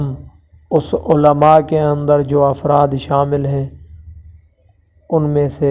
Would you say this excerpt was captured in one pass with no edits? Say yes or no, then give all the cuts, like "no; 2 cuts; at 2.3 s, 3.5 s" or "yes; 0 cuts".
yes; 0 cuts